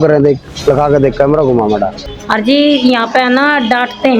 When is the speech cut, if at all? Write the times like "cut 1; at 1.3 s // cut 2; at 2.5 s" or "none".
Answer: cut 1; at 1.9 s